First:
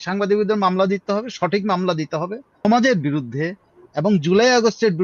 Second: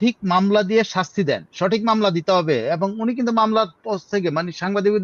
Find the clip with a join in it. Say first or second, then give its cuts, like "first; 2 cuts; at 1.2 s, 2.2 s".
first; 1 cut; at 2.6 s